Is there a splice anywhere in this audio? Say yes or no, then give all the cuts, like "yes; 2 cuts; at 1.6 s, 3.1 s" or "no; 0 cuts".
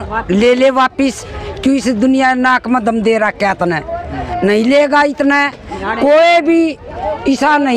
no; 0 cuts